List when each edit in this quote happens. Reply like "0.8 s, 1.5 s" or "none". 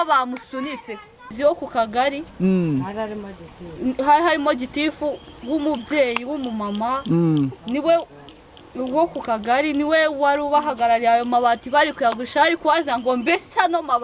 1.3 s